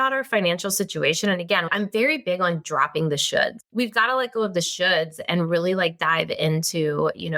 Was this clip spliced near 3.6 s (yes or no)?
yes